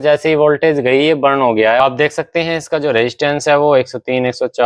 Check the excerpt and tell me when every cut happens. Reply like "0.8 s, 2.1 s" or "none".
1.8 s